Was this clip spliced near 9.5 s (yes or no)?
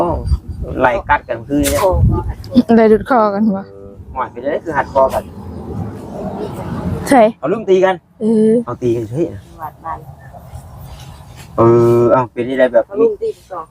no